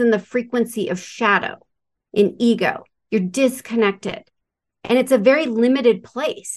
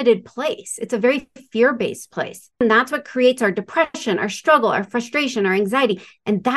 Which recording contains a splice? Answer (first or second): second